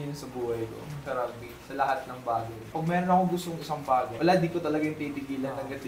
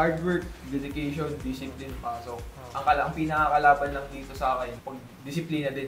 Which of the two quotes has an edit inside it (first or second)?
first